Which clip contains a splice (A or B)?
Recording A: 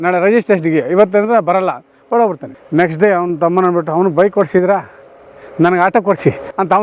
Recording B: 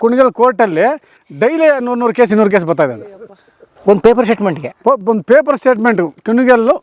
A